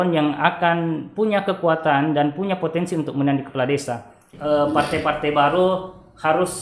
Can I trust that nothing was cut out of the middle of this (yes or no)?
no